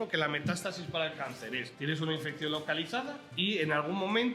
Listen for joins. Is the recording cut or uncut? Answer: cut